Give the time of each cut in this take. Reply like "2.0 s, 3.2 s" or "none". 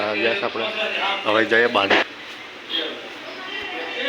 2.0 s